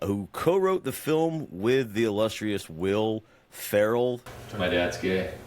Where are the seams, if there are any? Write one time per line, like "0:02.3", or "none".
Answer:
0:04.3